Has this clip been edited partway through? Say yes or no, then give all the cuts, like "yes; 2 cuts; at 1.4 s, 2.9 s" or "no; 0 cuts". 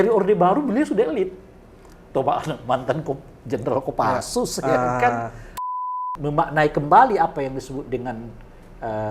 yes; 1 cut; at 5.6 s